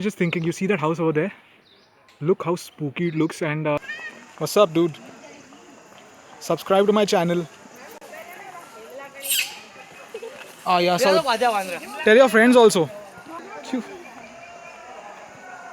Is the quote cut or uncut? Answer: cut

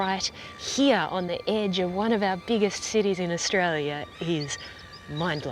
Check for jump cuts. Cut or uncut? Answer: uncut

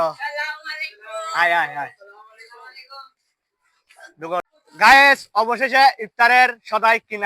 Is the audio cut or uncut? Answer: cut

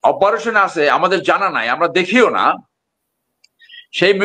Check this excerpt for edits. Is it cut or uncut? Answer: uncut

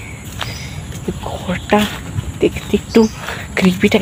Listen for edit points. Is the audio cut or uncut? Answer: uncut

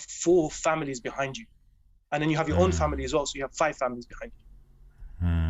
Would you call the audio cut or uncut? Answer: uncut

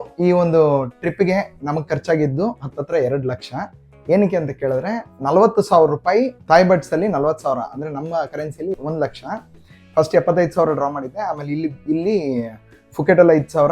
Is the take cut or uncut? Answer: uncut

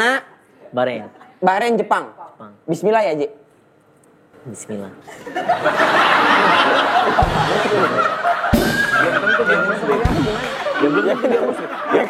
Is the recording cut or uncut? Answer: uncut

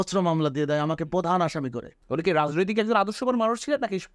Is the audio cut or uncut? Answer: cut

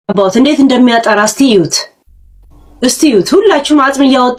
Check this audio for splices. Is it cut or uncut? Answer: uncut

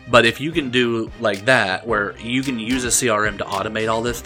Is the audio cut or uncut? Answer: uncut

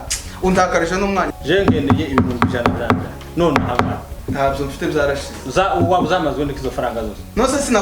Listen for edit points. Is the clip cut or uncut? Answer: cut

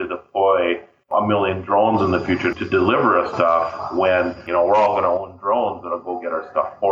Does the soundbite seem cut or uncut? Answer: cut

